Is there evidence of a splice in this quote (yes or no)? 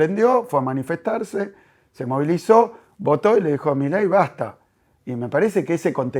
no